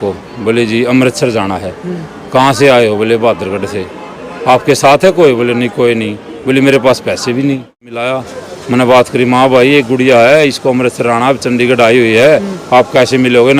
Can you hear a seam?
yes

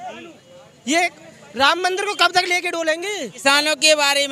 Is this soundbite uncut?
no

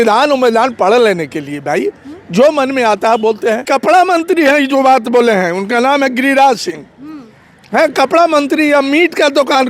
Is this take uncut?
no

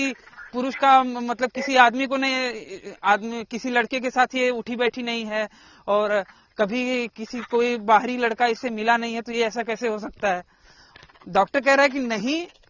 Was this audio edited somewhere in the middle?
no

